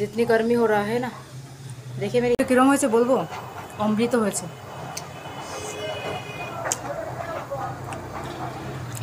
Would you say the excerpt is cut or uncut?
cut